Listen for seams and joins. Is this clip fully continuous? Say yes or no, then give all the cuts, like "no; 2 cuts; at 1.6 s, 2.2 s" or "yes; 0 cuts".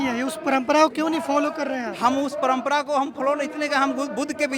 yes; 0 cuts